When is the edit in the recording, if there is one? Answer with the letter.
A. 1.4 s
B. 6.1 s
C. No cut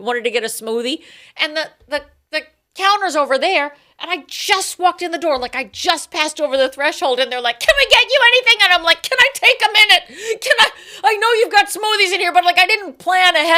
C